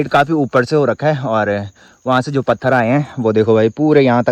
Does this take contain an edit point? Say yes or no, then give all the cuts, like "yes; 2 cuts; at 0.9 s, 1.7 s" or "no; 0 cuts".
no; 0 cuts